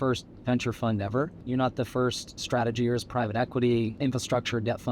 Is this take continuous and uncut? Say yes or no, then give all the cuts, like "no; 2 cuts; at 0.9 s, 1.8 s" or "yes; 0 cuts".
no; 3 cuts; at 1.4 s, 2.3 s, 3.9 s